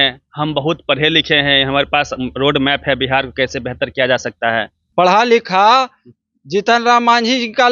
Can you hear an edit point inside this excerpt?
no; 0 cuts

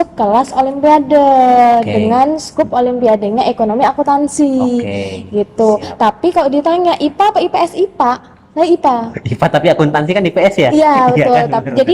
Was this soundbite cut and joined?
no; 0 cuts

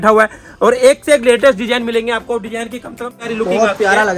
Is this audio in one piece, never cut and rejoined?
no; 1 cut; at 3.2 s

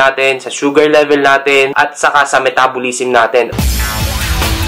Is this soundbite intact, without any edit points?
no; 1 cut; at 3.5 s

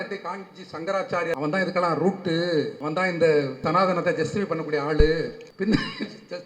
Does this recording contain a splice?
yes; 4 cuts; at 1.3 s, 2.8 s, 3.6 s, 5.4 s

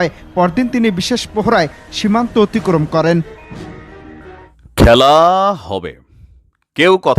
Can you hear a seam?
yes; 1 cut; at 4.5 s

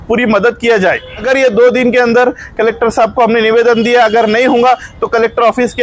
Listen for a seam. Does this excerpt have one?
yes; 1 cut; at 1.2 s

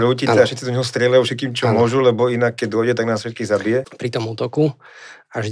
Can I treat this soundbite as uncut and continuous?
no; 1 cut; at 3.9 s

